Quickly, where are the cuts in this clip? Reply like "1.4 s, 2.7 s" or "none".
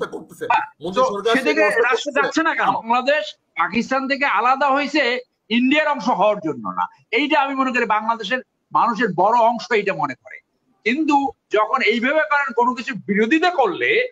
2.8 s